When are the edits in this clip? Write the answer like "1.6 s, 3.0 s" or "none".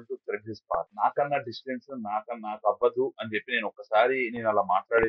0.9 s